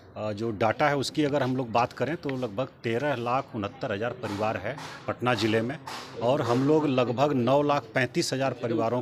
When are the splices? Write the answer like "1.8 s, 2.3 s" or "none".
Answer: none